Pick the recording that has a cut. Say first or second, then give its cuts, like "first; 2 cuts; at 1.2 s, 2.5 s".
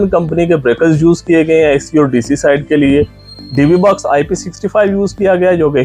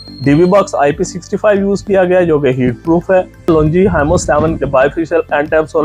second; 1 cut; at 3.5 s